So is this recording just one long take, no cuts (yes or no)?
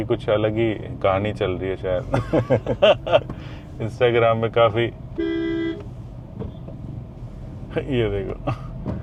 yes